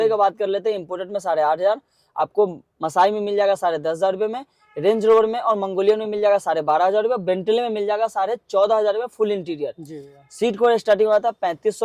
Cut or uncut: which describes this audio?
uncut